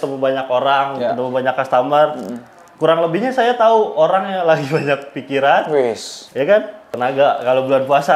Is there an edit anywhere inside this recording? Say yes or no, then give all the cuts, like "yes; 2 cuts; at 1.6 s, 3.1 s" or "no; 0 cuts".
yes; 1 cut; at 6.8 s